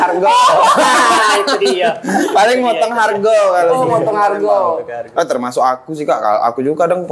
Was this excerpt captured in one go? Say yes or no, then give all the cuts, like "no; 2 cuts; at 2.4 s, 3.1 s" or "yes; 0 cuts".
yes; 0 cuts